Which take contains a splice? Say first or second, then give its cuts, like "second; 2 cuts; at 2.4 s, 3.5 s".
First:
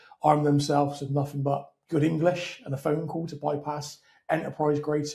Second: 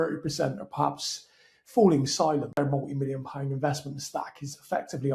second; 1 cut; at 2.6 s